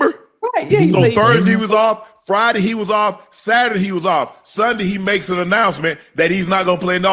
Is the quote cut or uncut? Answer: uncut